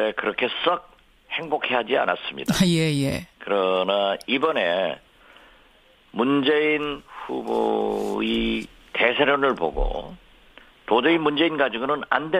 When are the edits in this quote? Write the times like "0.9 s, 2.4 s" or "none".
none